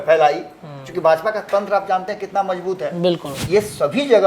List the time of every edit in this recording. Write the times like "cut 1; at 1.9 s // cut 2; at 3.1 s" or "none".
cut 1; at 3.3 s

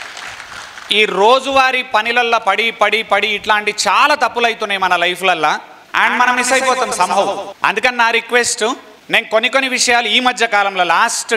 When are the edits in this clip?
cut 1; at 5.8 s // cut 2; at 7.4 s // cut 3; at 8.9 s

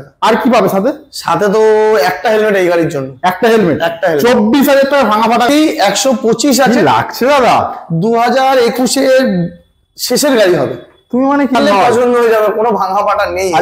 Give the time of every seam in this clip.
cut 1; at 5.5 s // cut 2; at 11.5 s

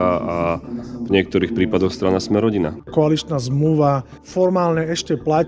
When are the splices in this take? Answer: cut 1; at 2.9 s // cut 2; at 4.2 s

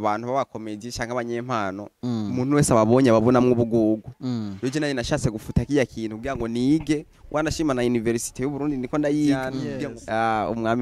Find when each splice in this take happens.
cut 1; at 9.6 s

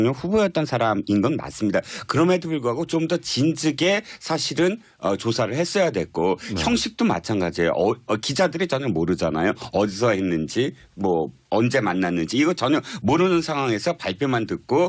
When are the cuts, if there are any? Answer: cut 1; at 6.9 s

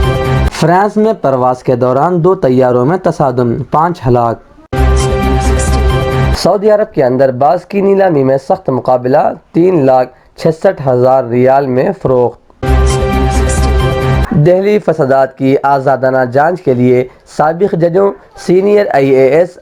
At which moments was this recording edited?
cut 1; at 4.7 s // cut 2; at 6.3 s // cut 3; at 12.6 s // cut 4; at 14.2 s

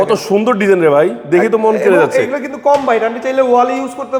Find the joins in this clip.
none

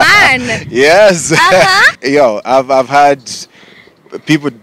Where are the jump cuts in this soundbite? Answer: cut 1; at 1.9 s

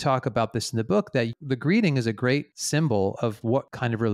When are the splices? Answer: cut 1; at 1.3 s

